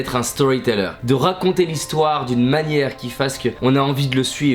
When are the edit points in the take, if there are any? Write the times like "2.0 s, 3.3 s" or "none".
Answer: 1.0 s, 3.6 s